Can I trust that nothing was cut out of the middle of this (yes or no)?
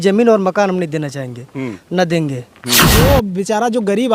no